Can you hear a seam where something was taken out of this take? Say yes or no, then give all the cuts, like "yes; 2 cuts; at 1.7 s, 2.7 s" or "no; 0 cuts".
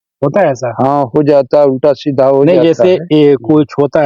yes; 1 cut; at 2.5 s